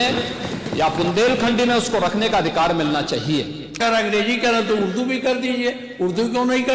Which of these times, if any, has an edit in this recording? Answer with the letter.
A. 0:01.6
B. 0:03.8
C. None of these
B